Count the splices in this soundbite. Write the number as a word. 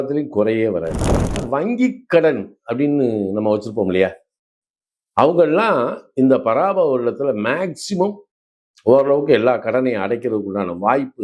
one